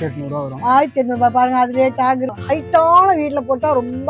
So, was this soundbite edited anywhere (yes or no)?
yes